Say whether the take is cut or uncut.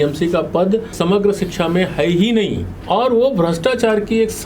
cut